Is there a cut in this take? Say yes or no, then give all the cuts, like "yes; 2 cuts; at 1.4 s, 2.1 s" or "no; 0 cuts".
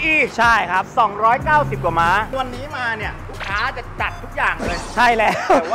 yes; 1 cut; at 2.3 s